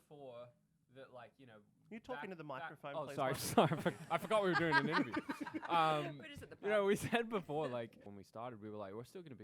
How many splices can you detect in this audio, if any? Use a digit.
1